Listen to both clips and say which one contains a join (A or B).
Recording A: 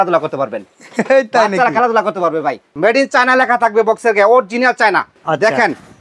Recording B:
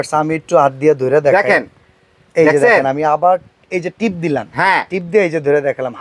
A